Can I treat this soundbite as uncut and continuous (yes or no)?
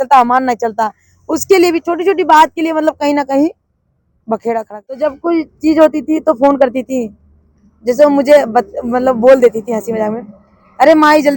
no